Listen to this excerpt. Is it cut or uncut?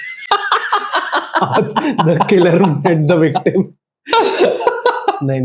uncut